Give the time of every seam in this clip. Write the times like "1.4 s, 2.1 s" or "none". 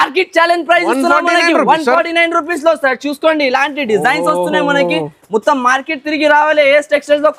none